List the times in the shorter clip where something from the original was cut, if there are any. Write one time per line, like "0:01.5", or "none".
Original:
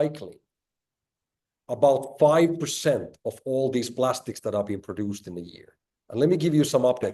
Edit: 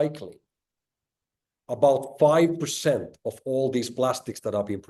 none